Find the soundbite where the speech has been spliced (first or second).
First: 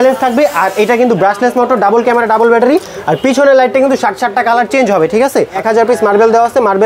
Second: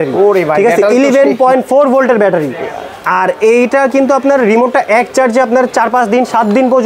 first